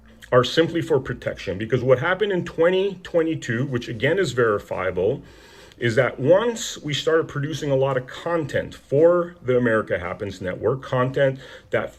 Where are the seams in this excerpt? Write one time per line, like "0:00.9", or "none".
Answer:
none